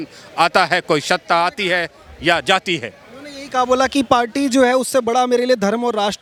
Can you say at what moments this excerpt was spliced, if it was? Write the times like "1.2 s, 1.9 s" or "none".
none